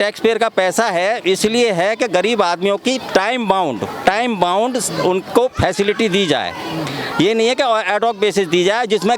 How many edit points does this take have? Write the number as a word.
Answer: zero